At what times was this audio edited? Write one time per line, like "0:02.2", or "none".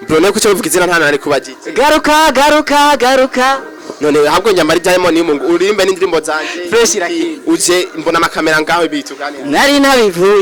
none